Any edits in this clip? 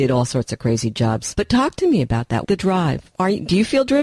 yes; 2 cuts; at 1.3 s, 2.4 s

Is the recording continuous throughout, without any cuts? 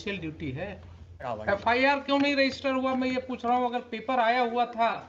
no; 1 cut; at 1.3 s

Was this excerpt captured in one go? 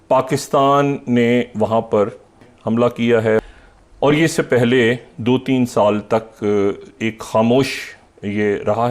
no; 2 cuts; at 2.5 s, 3.4 s

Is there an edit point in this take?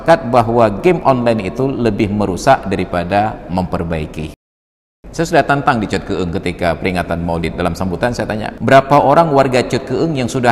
yes; 2 cuts; at 4.7 s, 8.5 s

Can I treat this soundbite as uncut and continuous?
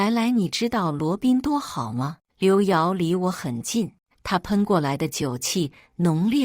no; 1 cut; at 2.2 s

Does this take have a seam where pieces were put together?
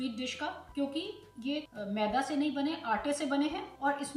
no; 0 cuts

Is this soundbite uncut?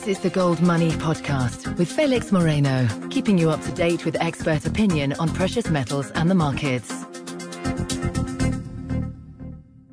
yes; 0 cuts

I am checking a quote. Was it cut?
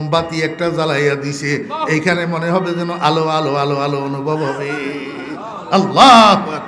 no; 0 cuts

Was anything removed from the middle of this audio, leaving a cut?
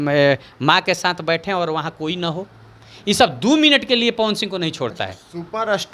no; 0 cuts

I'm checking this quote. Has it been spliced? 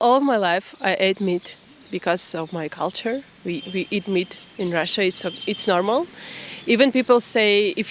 no; 0 cuts

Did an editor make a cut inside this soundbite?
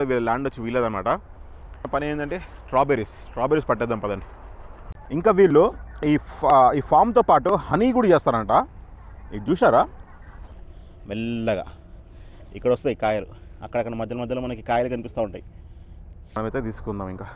yes; 3 cuts; at 1.8 s, 10.5 s, 16.4 s

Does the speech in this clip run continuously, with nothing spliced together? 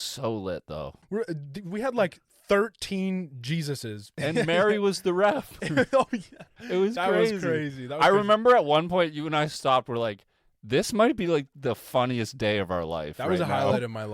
no; 2 cuts; at 1.0 s, 4.1 s

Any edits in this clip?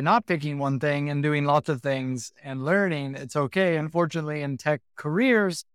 no; 0 cuts

